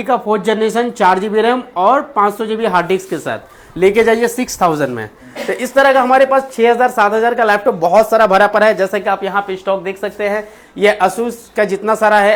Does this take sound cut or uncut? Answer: uncut